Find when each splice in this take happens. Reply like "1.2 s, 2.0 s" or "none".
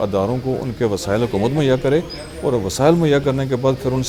none